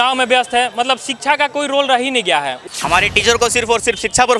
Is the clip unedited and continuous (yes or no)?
no